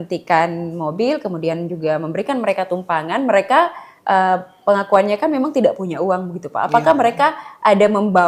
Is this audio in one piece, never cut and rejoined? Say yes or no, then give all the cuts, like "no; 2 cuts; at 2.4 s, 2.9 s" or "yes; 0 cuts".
yes; 0 cuts